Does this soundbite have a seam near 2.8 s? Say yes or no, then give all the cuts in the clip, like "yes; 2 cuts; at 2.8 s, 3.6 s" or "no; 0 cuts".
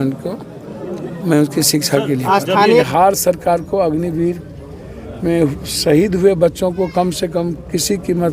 yes; 1 cut; at 2.8 s